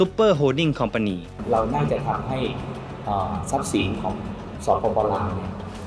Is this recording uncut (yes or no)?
no